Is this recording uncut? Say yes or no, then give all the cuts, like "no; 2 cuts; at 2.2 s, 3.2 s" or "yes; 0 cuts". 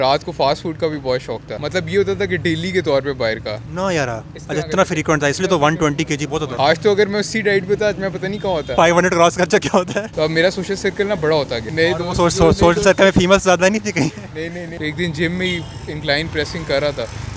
no; 6 cuts; at 1.5 s, 6.5 s, 8.7 s, 10.1 s, 11.6 s, 14.7 s